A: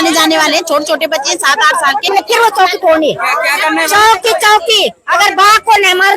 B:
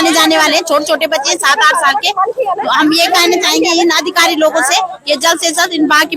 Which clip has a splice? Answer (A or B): A